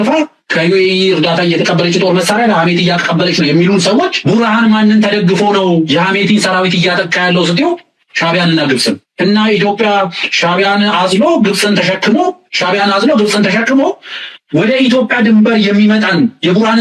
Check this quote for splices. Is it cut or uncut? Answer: uncut